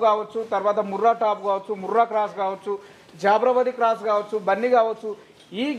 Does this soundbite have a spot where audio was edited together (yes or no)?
no